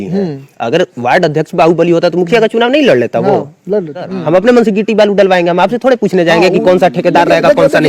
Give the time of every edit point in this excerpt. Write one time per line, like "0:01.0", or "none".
0:04.0